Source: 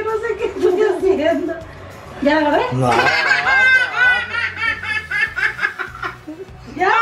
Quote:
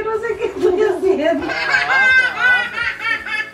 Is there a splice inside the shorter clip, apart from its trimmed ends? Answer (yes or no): yes